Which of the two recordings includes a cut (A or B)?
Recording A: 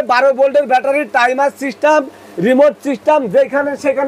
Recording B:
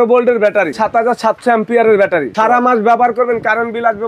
B